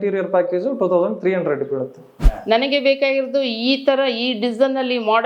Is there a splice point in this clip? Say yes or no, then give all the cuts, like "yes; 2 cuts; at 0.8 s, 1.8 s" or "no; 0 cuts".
yes; 1 cut; at 2.1 s